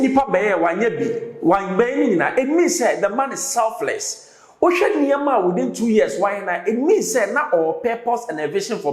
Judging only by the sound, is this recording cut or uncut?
uncut